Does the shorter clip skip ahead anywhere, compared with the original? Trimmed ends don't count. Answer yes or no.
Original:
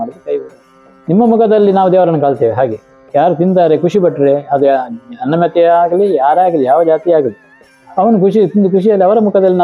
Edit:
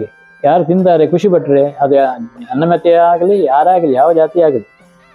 no